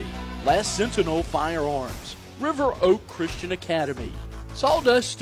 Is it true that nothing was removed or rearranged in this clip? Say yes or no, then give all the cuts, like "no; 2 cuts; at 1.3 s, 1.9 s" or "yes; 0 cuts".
yes; 0 cuts